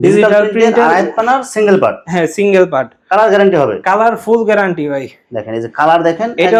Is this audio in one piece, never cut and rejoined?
yes; 0 cuts

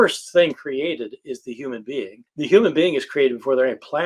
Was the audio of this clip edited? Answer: yes; 1 cut; at 2.2 s

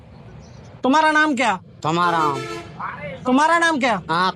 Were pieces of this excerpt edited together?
no; 0 cuts

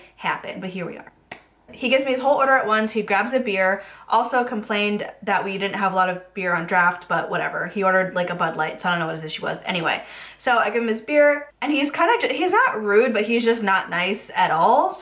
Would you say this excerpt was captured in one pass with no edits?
yes; 0 cuts

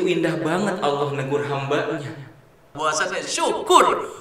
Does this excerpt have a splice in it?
yes; 1 cut; at 2.7 s

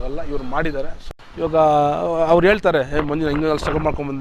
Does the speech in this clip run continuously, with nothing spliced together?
no; 1 cut; at 1.0 s

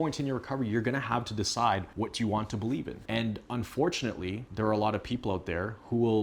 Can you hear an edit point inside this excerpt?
yes; 3 cuts; at 1.9 s, 3.0 s, 4.4 s

